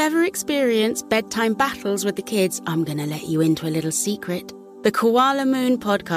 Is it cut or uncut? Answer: uncut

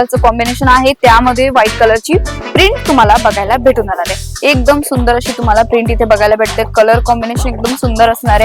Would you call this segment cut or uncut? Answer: uncut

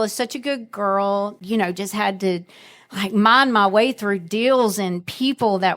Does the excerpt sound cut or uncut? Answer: cut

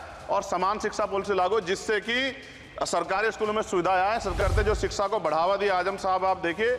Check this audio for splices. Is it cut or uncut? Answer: cut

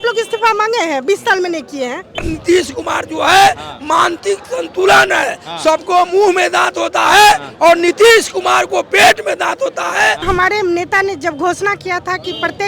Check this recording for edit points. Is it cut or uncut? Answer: cut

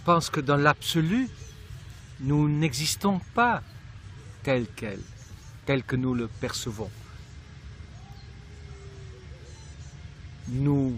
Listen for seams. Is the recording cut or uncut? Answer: cut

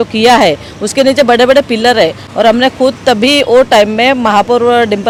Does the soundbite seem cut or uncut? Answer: uncut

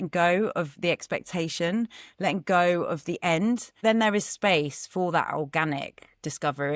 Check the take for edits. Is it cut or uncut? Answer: cut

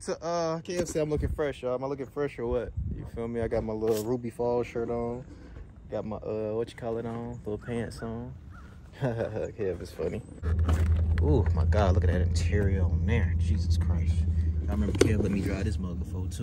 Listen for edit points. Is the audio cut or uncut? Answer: cut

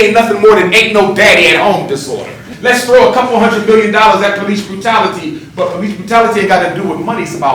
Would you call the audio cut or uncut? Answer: cut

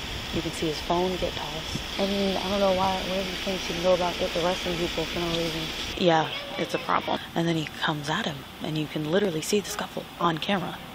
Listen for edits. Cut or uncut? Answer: cut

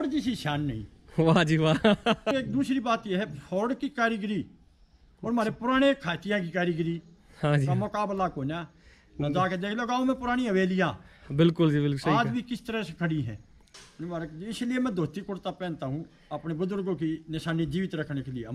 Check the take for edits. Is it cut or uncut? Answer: cut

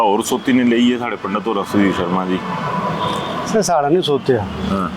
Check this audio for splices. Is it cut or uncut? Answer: uncut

